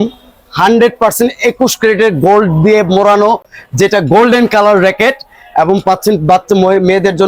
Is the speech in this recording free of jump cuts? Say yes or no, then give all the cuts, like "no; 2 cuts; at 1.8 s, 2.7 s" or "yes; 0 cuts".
yes; 0 cuts